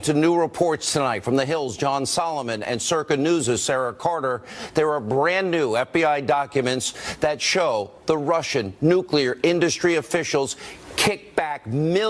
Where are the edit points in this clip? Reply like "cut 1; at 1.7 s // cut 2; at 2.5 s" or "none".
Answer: none